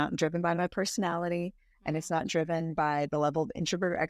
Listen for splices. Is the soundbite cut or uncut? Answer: uncut